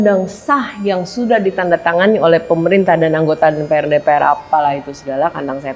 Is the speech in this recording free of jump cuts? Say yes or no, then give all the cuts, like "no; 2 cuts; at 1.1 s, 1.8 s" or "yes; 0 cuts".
yes; 0 cuts